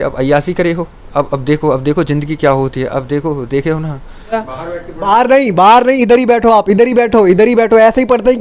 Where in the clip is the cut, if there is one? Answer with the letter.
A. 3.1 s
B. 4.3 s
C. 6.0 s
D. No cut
B